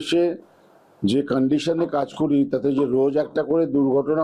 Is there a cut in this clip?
no; 0 cuts

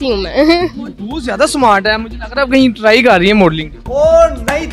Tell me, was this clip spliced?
no; 0 cuts

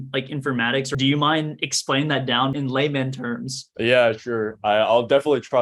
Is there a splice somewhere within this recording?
yes; 3 cuts; at 0.9 s, 2.6 s, 3.6 s

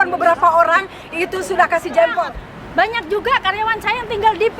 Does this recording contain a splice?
yes; 1 cut; at 2.4 s

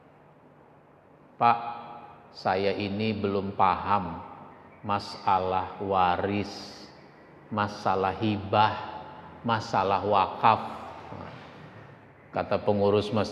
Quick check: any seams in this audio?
yes; 1 cut; at 12.1 s

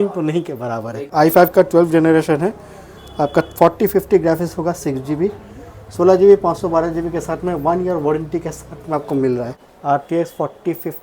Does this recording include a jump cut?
yes; 2 cuts; at 1.0 s, 9.6 s

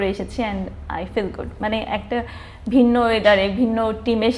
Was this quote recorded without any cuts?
yes; 0 cuts

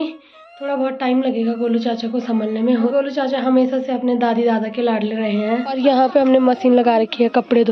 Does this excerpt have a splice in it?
yes; 2 cuts; at 2.9 s, 5.8 s

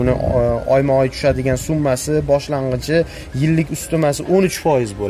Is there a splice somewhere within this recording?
no; 0 cuts

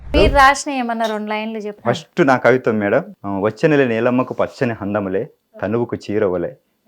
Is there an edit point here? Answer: yes; 2 cuts; at 1.7 s, 3.2 s

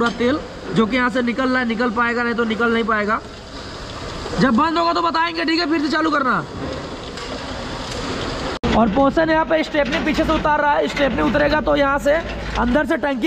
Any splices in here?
no; 0 cuts

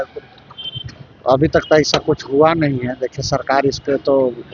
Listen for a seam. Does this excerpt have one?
no; 0 cuts

